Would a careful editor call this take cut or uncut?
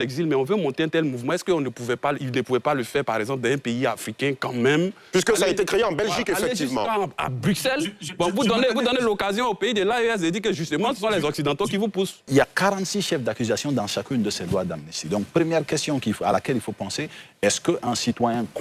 cut